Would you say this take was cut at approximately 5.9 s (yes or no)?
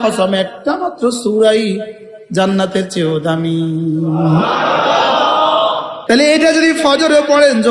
yes